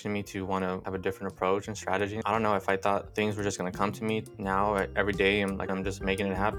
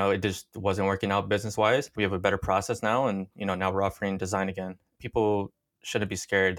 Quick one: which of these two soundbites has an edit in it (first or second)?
first